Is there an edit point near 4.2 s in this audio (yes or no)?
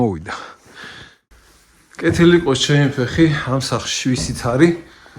no